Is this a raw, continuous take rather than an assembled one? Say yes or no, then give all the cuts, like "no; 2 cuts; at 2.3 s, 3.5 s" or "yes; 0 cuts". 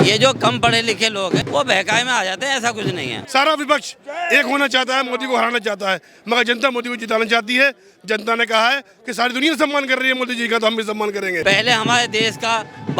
no; 3 cuts; at 1.5 s, 3.1 s, 11.4 s